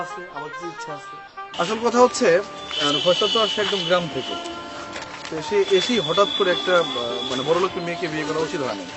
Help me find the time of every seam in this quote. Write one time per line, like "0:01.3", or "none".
0:01.5